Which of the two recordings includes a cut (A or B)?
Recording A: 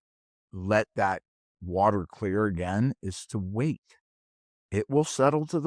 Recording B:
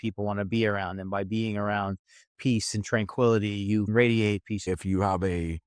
B